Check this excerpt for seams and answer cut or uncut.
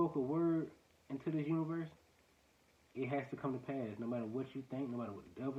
uncut